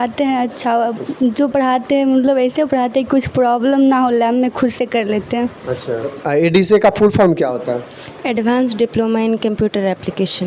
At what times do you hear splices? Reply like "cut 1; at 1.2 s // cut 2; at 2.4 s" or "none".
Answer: cut 1; at 6.1 s